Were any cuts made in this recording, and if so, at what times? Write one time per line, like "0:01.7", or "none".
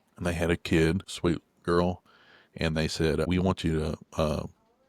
0:01.1
0:03.3